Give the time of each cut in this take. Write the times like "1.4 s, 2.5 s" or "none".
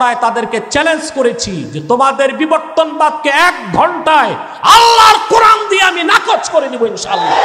none